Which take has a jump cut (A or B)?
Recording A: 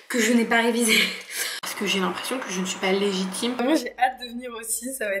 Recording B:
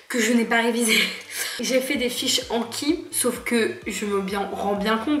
A